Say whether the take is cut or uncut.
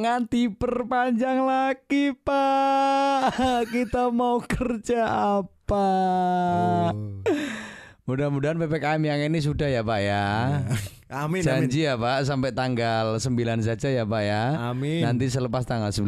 uncut